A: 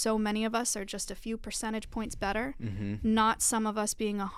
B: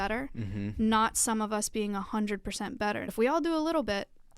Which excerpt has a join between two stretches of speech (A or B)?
B